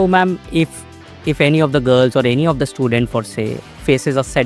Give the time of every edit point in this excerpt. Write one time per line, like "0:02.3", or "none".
none